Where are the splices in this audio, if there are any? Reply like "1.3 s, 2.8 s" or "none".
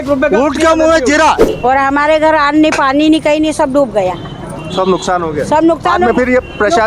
1.4 s